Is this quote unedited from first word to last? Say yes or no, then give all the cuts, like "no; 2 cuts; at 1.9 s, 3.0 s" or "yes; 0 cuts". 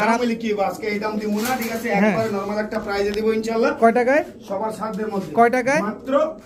yes; 0 cuts